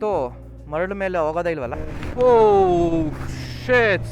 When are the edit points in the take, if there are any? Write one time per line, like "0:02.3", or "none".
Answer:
0:01.7